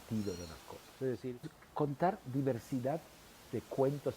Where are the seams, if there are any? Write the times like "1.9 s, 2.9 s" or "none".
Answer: 1.6 s